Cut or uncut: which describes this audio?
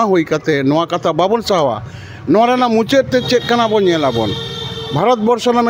uncut